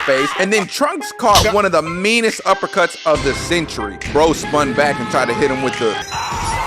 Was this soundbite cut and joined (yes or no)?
yes